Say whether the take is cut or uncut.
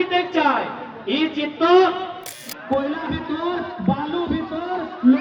cut